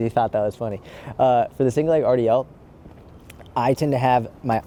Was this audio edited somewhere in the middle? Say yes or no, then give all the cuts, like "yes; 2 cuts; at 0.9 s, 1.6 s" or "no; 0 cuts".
no; 0 cuts